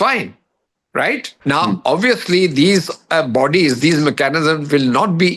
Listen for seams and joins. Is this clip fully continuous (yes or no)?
no